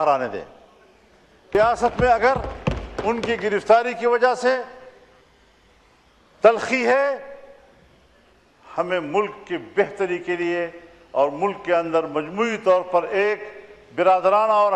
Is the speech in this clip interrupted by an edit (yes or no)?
yes